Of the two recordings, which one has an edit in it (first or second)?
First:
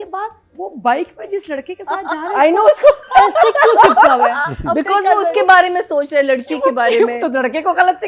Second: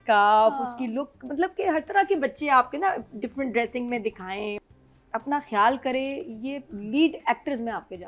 second